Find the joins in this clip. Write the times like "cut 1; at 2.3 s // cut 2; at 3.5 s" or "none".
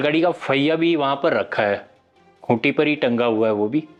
none